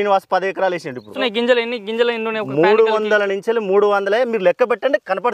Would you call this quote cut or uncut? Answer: cut